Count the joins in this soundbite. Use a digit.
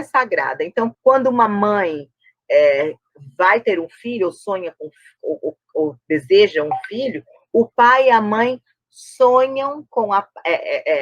1